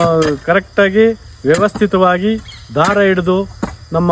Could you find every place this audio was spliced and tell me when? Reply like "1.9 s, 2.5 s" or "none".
none